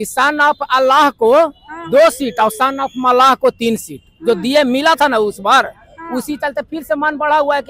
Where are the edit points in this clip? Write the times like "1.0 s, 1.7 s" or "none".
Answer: none